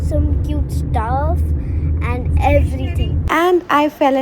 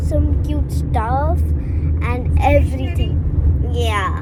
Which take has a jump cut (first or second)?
first